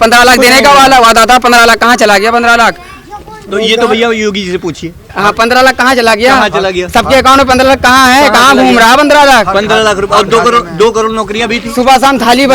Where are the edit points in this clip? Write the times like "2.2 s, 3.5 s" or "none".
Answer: none